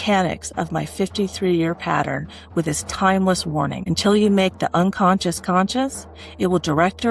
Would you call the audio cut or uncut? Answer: cut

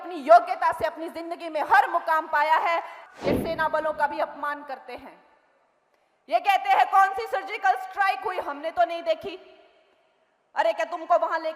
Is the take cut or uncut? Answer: cut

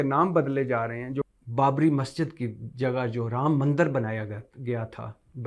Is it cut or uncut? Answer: cut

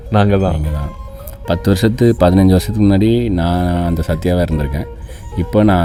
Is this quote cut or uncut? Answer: uncut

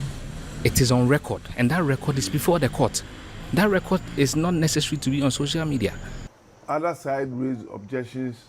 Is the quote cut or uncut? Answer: cut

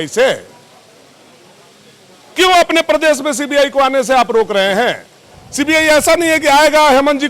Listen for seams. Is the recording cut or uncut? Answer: uncut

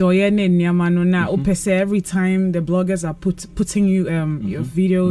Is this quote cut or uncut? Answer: uncut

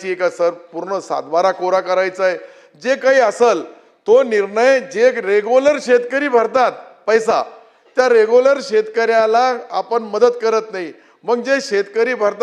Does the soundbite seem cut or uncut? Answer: uncut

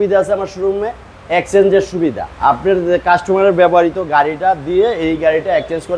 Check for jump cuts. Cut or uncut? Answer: cut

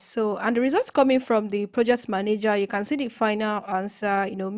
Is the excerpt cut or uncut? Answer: uncut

